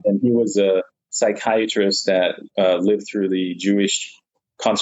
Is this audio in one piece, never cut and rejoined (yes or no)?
yes